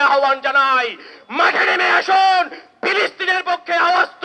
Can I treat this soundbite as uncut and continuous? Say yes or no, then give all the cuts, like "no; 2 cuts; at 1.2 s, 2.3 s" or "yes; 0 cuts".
yes; 0 cuts